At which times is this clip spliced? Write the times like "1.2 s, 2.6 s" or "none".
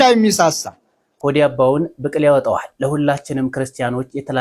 1.2 s